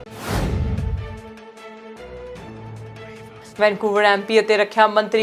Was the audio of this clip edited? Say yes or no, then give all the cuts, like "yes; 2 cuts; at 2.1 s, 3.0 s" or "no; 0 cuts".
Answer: yes; 1 cut; at 3.4 s